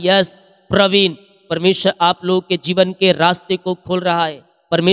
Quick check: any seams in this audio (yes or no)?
no